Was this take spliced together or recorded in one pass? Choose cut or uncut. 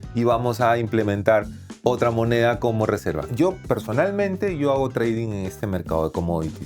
cut